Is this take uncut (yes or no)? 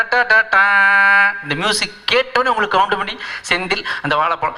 yes